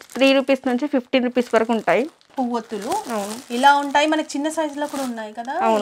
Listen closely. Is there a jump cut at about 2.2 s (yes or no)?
yes